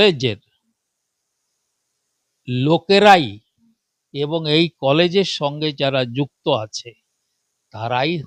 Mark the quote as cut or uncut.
uncut